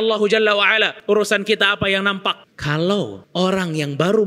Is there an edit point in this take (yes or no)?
yes